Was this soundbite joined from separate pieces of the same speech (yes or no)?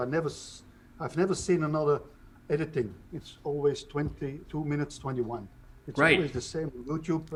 no